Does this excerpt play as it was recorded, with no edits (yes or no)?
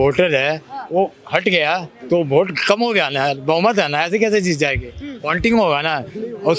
yes